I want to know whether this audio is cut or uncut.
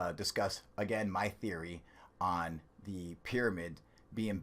cut